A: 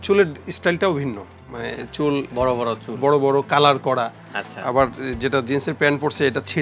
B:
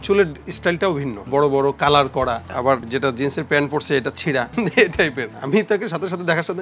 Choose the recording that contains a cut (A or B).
B